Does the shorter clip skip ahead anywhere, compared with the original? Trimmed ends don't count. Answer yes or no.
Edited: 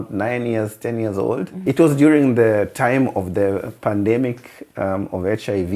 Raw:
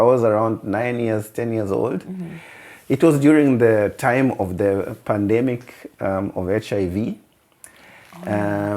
yes